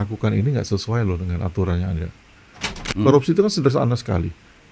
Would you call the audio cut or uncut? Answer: cut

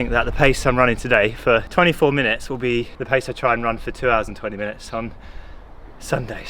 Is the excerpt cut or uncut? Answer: cut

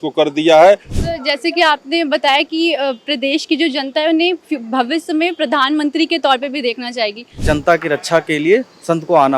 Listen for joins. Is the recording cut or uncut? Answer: cut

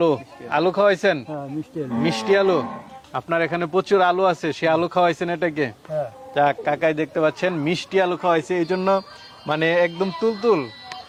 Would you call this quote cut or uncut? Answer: uncut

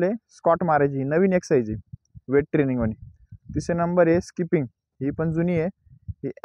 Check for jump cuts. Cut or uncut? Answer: uncut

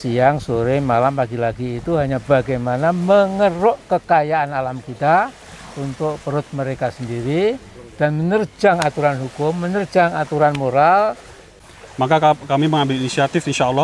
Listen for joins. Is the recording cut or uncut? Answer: cut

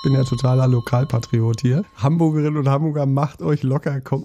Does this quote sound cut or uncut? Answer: cut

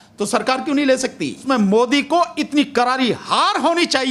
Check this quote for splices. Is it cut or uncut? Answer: cut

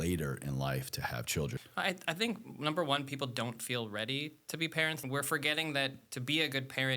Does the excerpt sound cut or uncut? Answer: cut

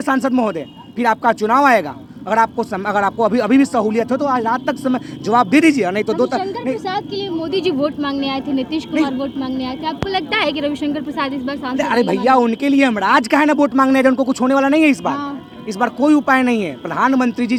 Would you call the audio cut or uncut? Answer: uncut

